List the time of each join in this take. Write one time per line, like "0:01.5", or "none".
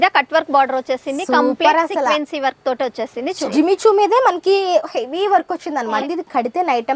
0:03.5
0:06.0